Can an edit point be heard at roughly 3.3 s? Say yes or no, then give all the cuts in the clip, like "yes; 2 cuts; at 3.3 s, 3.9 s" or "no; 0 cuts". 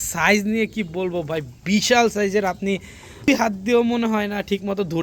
yes; 1 cut; at 3.3 s